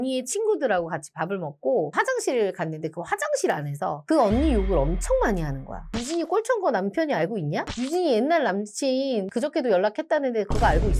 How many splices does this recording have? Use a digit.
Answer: 0